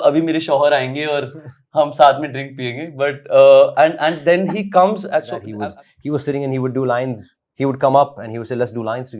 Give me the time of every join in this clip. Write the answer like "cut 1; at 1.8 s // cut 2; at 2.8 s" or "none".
cut 1; at 5.4 s